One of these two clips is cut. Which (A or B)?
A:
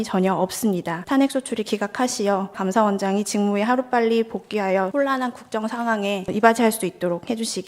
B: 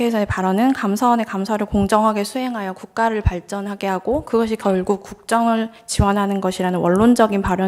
A